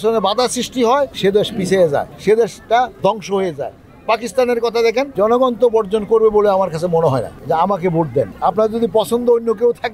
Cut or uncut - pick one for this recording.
cut